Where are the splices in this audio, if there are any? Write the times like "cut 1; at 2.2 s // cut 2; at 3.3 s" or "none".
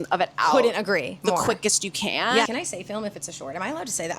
cut 1; at 2.5 s